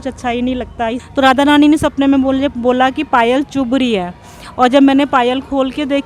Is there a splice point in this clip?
yes; 1 cut; at 1.0 s

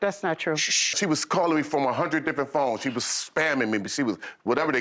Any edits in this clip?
yes; 1 cut; at 1.0 s

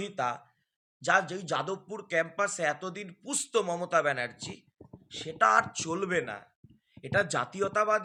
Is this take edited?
no; 0 cuts

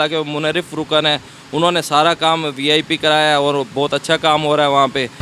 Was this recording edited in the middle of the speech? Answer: no; 0 cuts

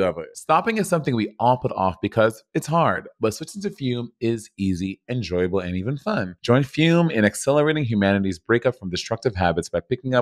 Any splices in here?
yes; 1 cut; at 6.3 s

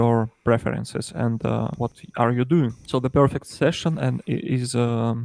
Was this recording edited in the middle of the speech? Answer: yes; 2 cuts; at 1.7 s, 2.8 s

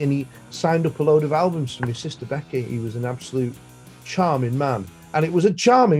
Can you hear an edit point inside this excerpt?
no; 0 cuts

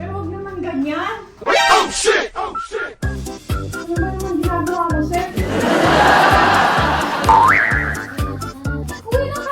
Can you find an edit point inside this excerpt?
no; 0 cuts

